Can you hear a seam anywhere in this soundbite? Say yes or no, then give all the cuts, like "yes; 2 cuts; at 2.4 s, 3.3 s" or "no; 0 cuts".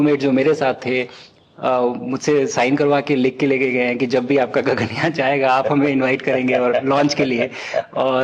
no; 0 cuts